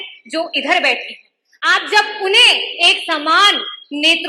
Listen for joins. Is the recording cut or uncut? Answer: uncut